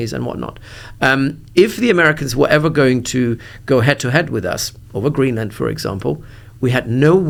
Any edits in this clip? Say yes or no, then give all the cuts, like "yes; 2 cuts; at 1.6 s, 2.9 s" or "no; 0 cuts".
no; 0 cuts